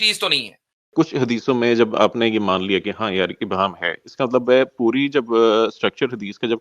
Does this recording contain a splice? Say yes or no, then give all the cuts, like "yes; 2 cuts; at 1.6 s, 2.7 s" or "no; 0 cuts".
yes; 1 cut; at 0.9 s